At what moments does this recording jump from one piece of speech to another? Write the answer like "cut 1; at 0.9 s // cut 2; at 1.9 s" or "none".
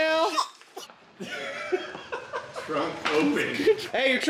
none